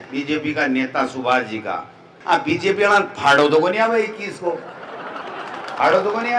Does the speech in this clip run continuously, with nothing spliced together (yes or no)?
no